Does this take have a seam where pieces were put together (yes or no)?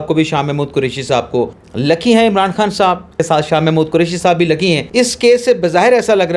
yes